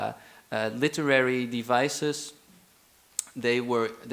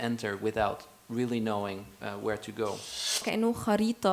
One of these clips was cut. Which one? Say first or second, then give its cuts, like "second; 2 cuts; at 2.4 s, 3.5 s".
second; 1 cut; at 3.2 s